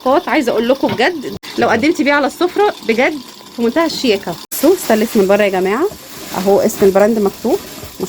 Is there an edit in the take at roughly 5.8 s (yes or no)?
no